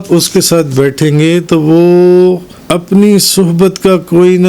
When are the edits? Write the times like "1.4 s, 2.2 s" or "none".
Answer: 2.5 s